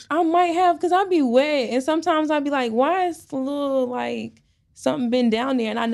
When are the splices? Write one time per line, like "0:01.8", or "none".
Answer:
none